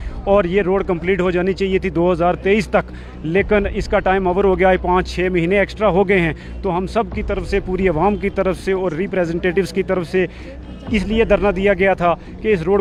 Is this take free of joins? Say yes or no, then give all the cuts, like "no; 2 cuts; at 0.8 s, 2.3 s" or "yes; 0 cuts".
yes; 0 cuts